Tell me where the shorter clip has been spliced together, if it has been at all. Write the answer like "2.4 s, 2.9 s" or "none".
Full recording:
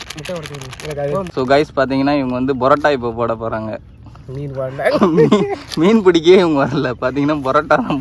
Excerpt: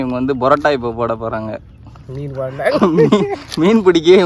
none

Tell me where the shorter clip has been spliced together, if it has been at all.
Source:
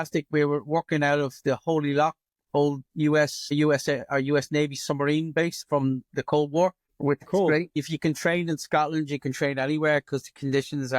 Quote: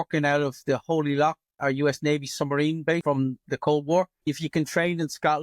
1.5 s, 3.0 s, 4.2 s

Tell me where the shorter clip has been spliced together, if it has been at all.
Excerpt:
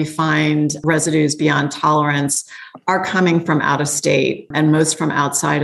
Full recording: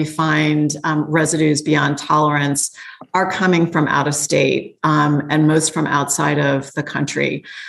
0.8 s, 4.5 s

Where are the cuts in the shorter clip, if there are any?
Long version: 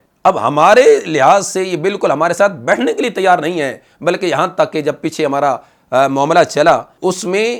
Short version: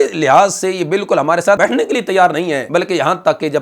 1.6 s, 2.6 s

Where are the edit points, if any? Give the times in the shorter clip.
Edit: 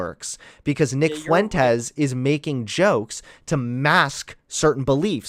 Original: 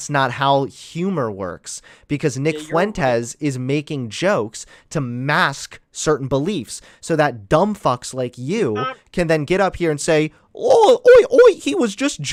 none

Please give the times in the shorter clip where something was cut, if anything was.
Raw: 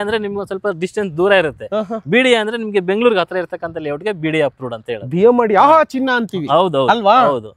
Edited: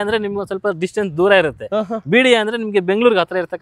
none

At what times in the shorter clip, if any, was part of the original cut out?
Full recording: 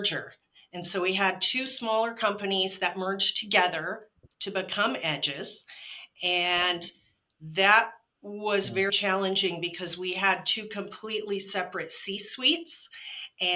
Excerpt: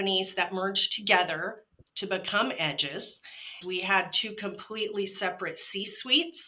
3.5 s

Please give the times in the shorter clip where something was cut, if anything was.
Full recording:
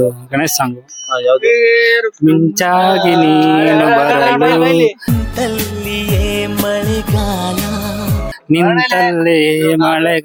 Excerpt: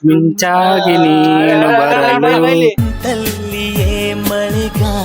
2.8 s

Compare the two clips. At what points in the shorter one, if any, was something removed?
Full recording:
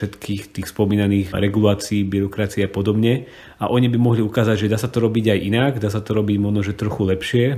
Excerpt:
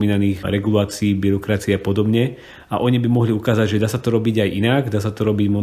none

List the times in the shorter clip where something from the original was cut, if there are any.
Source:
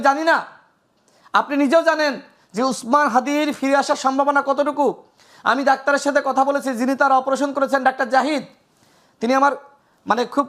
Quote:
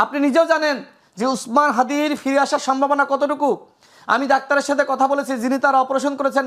none

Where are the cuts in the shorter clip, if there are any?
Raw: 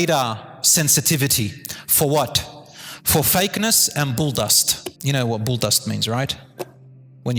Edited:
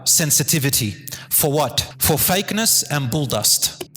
1.9 s

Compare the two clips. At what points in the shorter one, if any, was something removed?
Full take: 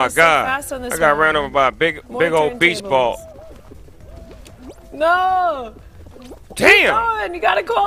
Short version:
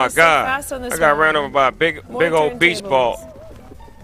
none

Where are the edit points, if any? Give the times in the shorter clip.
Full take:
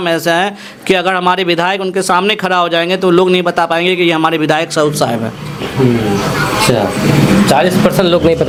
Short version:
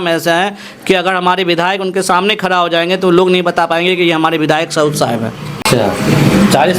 5.6 s

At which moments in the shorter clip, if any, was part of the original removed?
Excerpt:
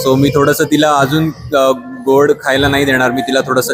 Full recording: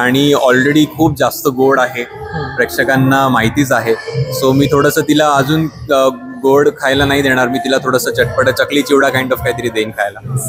none

